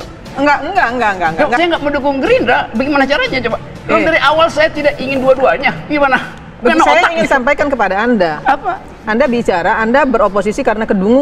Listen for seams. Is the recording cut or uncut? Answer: cut